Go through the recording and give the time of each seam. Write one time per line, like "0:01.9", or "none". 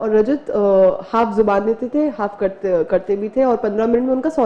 none